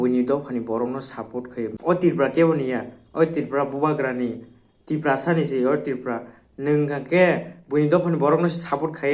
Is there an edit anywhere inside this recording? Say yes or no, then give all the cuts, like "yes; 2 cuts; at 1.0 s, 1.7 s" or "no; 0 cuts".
yes; 1 cut; at 1.7 s